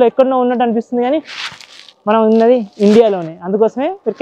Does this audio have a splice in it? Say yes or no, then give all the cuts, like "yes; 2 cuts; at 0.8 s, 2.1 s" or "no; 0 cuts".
no; 0 cuts